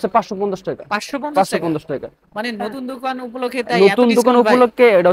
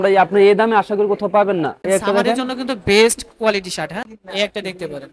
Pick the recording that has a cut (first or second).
second